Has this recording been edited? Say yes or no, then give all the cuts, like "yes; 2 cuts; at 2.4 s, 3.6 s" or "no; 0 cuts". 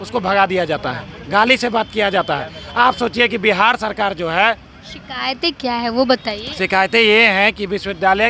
no; 0 cuts